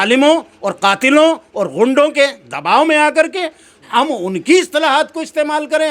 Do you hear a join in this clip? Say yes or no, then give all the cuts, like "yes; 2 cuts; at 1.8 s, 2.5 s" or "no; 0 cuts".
no; 0 cuts